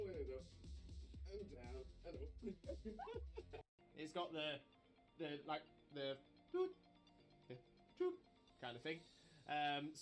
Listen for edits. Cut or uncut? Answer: cut